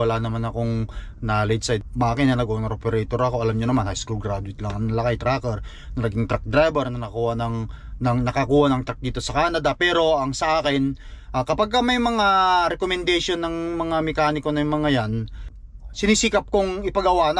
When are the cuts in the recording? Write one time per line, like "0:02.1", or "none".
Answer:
0:01.8
0:15.5